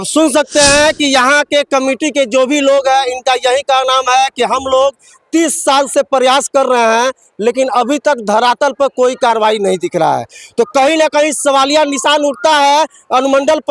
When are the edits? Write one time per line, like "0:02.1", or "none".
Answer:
none